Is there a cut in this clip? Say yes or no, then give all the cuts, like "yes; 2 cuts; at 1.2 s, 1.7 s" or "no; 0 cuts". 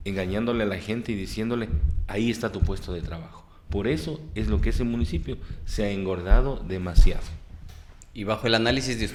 no; 0 cuts